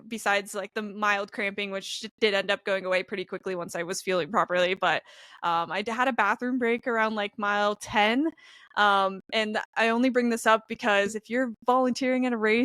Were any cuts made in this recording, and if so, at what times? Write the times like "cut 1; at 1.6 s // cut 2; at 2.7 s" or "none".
none